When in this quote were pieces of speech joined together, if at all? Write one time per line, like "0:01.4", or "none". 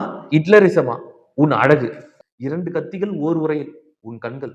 0:02.0

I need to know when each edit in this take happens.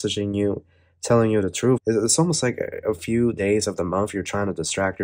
0:01.8

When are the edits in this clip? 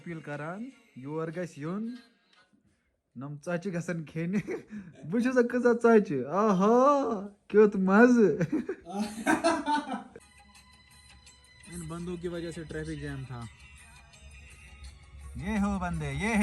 0:10.1

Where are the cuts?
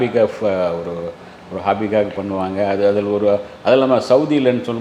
none

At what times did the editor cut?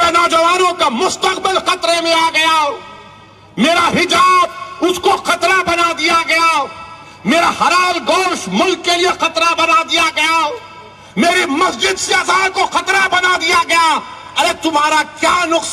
none

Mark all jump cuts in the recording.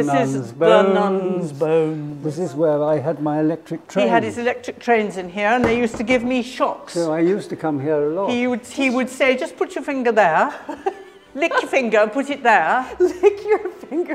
0:02.1

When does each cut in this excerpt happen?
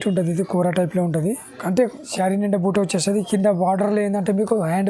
0:02.0

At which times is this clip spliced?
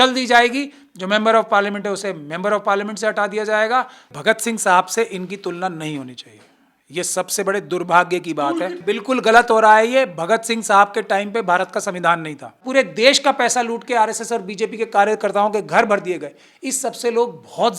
0:04.1
0:08.8
0:12.6

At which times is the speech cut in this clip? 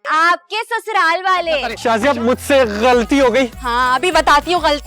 0:01.7

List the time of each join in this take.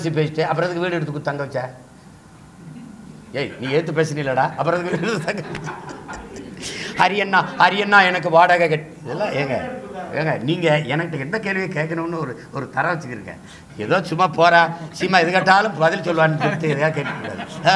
none

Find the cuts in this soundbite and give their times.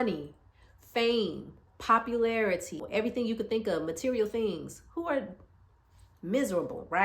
0:02.9

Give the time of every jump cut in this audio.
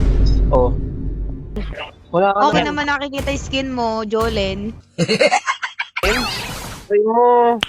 0:06.0

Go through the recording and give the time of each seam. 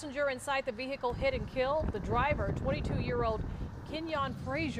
none

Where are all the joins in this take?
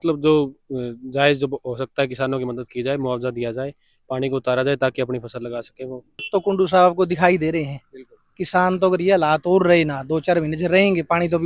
0:06.2

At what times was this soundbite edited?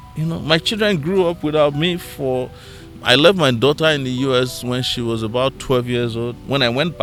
none

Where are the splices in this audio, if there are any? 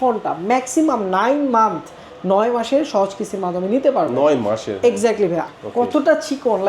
0:05.5

